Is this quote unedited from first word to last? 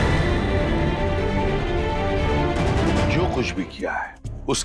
no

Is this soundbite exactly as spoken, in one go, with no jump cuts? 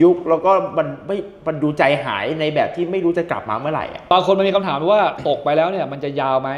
no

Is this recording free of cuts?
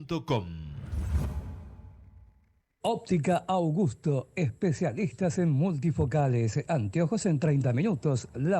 no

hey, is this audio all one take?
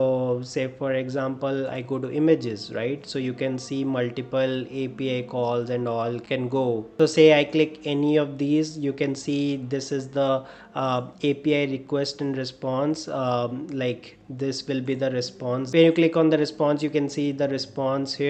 yes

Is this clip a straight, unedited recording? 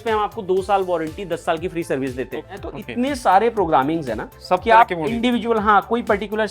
no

